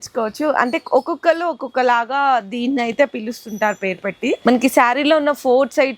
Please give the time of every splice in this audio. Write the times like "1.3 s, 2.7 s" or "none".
4.4 s